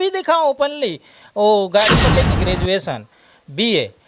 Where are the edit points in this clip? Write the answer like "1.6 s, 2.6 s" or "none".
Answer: 2.3 s